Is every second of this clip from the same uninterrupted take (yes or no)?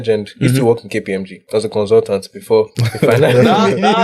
no